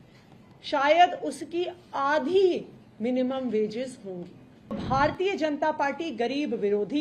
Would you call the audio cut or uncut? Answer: cut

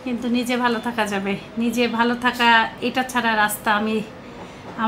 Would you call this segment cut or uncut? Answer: uncut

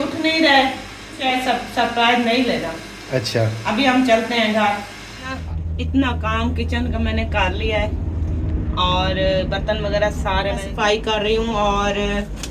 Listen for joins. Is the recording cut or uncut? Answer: cut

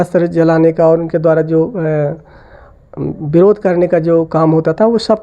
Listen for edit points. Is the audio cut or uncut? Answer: uncut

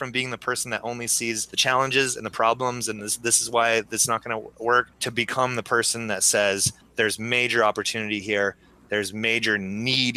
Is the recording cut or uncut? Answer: cut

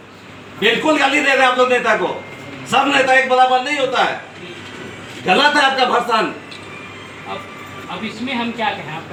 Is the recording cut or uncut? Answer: uncut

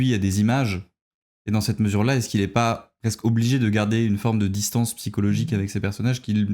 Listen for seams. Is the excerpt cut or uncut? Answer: uncut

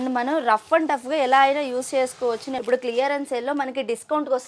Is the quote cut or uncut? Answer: cut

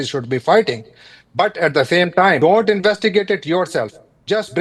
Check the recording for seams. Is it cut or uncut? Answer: cut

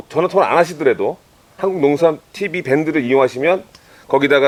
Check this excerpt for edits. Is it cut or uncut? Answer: uncut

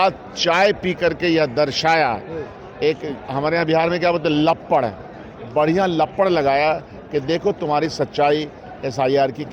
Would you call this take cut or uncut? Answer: uncut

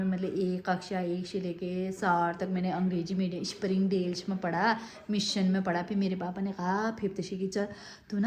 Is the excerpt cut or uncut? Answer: uncut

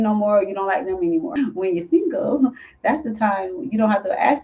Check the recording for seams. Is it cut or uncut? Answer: cut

